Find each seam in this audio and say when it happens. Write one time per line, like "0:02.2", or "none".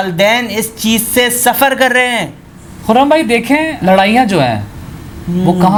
none